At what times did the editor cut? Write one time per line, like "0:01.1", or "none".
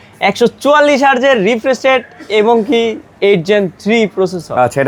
none